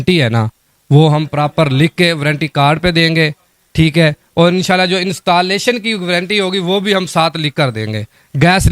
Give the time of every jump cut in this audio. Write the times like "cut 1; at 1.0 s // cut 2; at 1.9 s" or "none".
none